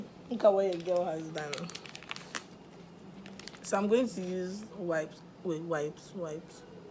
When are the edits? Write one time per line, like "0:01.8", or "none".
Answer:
0:05.4